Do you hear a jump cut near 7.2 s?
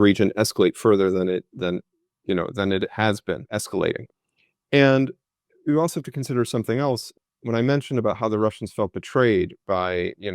yes; 2 cuts; at 3.6 s, 7.2 s

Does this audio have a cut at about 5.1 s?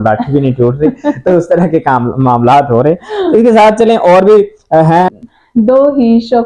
yes; 1 cut; at 5.1 s

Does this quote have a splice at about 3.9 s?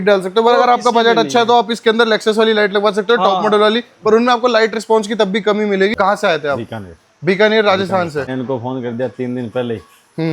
no; 2 cuts; at 5.9 s, 8.3 s

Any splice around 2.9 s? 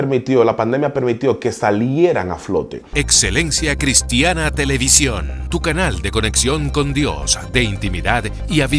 yes; 1 cut; at 2.9 s

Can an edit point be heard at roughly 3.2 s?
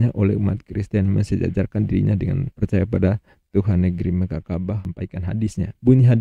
no; 1 cut; at 4.8 s

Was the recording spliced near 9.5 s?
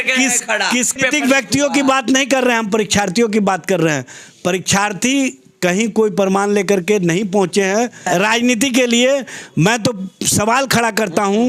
no; 2 cuts; at 1.0 s, 8.0 s

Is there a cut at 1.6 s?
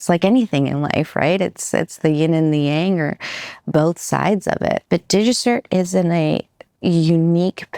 no; 1 cut; at 4.8 s

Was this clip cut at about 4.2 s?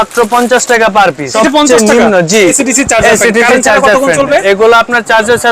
no; 2 cuts; at 1.3 s, 2.6 s

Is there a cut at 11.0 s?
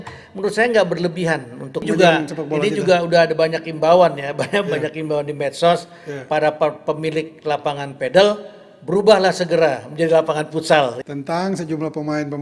yes; 2 cuts; at 1.8 s, 11.0 s

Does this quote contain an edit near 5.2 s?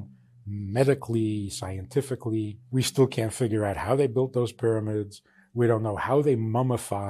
no; 1 cut; at 2.6 s

